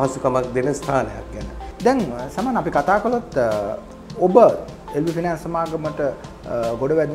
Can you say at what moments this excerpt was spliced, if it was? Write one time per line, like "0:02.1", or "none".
none